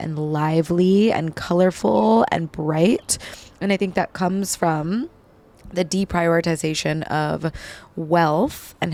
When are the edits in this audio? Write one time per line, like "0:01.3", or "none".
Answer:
none